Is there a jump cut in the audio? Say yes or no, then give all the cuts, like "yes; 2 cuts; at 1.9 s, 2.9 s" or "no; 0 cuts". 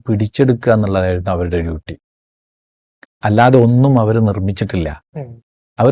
no; 0 cuts